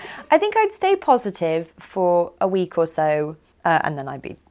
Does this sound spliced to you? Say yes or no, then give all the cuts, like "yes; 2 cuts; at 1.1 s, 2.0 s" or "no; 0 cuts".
yes; 1 cut; at 3.4 s